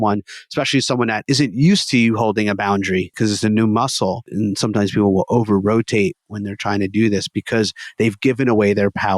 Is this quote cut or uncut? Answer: cut